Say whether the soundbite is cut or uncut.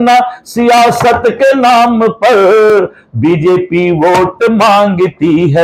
uncut